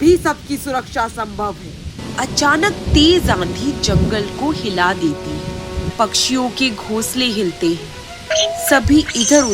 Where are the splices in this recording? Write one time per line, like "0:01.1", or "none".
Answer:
0:02.0
0:05.9